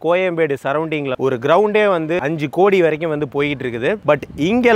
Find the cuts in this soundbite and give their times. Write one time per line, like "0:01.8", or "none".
0:01.2
0:02.2